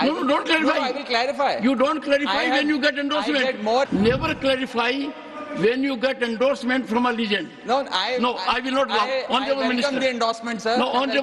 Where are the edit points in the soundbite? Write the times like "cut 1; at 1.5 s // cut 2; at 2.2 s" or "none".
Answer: cut 1; at 3.9 s